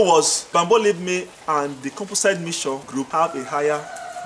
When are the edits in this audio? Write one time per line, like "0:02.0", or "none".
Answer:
none